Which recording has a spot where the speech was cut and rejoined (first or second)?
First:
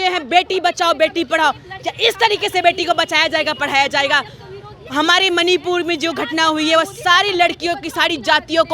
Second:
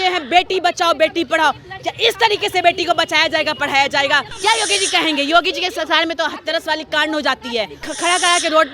second